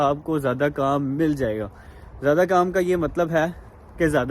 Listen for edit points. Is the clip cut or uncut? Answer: uncut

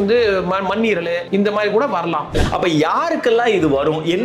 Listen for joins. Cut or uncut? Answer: cut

